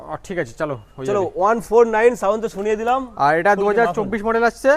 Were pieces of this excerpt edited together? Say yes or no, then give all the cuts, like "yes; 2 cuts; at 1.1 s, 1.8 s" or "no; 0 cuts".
no; 0 cuts